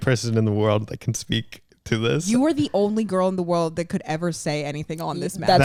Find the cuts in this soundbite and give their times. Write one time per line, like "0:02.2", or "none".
none